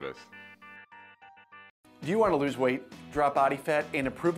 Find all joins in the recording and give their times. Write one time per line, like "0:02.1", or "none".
0:01.7